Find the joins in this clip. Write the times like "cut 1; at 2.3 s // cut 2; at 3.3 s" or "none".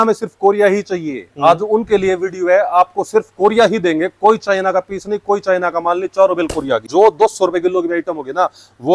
cut 1; at 6.9 s